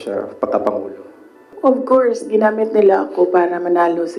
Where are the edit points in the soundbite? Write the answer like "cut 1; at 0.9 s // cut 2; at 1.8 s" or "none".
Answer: cut 1; at 1.5 s